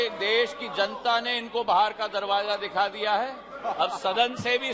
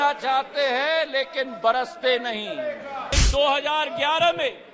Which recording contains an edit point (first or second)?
second